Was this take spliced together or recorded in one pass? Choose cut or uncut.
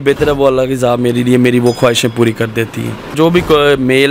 cut